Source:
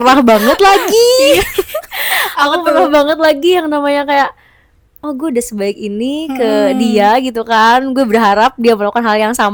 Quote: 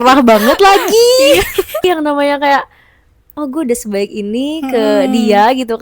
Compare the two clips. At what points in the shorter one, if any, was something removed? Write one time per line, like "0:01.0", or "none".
0:01.8

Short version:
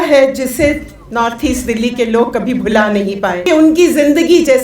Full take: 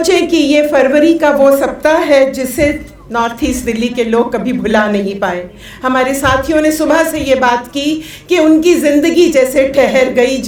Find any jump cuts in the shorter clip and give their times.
0:03.4

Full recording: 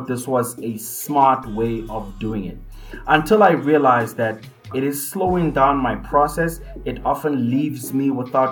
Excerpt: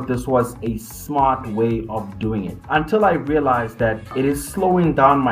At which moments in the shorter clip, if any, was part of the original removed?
0:02.6
0:04.0

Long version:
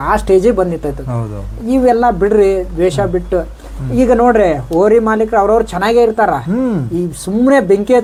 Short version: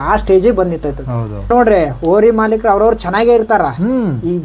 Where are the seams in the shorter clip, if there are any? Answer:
0:01.5

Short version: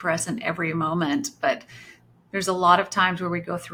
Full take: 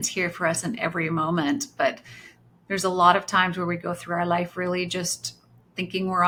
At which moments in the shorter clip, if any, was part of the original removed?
none

